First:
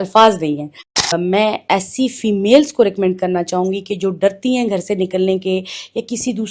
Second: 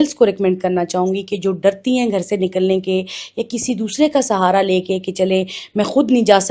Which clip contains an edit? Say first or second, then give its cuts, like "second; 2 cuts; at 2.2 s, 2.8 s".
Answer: first; 1 cut; at 1.1 s